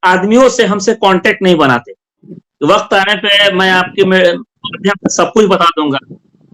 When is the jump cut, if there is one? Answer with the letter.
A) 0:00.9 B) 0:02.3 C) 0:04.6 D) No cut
B